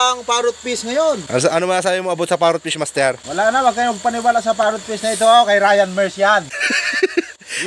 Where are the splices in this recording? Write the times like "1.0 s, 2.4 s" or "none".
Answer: 3.2 s, 6.6 s